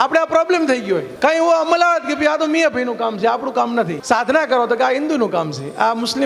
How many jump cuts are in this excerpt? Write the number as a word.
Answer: two